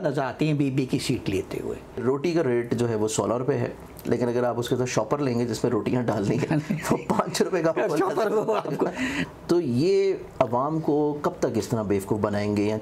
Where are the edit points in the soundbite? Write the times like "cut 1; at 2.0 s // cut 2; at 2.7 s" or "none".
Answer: cut 1; at 2.0 s // cut 2; at 9.2 s